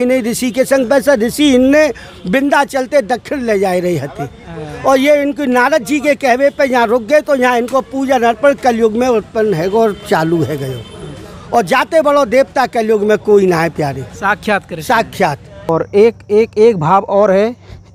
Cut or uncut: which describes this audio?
cut